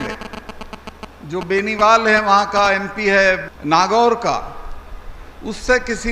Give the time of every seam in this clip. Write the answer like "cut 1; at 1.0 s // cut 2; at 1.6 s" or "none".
cut 1; at 3.5 s